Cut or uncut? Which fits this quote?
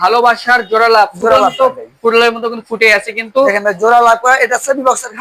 uncut